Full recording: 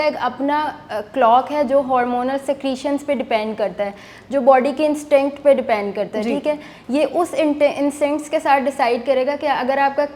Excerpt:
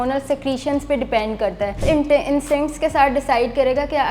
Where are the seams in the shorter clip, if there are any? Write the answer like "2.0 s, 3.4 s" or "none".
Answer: 1.8 s